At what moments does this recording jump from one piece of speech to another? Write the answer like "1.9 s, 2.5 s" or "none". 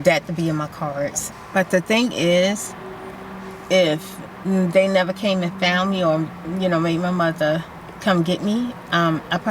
1.3 s

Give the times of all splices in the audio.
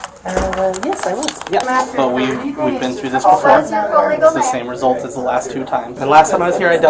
1.6 s, 5.9 s

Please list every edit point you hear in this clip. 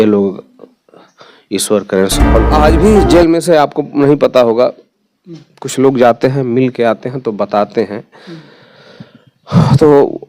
2.5 s

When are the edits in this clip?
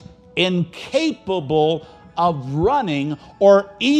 none

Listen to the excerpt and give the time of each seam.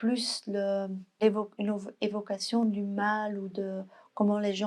1.2 s

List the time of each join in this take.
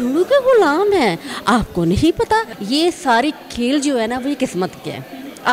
2.5 s

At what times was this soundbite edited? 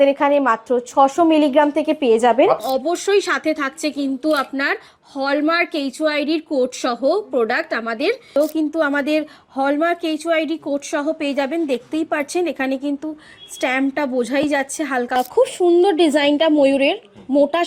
2.6 s, 8.3 s, 15.2 s

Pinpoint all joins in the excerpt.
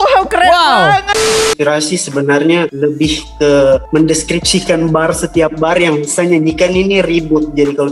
1.4 s, 2.7 s, 3.8 s

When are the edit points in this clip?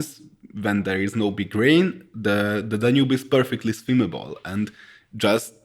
none

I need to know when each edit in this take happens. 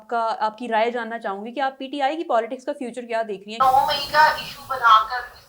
3.5 s

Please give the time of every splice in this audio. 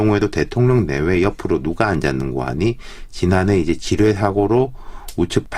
2.5 s

